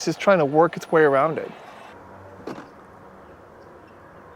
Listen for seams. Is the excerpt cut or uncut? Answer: cut